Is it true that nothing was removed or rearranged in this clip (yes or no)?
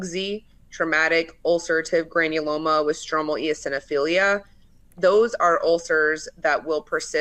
yes